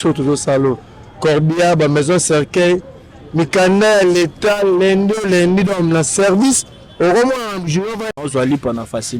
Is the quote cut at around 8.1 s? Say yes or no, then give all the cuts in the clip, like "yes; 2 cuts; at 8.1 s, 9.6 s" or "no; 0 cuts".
yes; 1 cut; at 8.1 s